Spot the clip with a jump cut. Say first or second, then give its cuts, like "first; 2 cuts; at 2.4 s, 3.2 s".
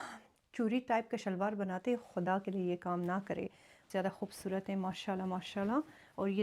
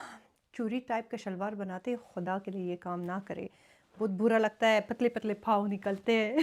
first; 1 cut; at 3.9 s